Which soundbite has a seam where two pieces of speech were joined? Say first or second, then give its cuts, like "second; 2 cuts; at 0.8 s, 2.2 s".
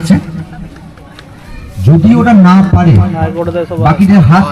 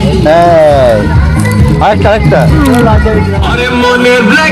second; 1 cut; at 3.5 s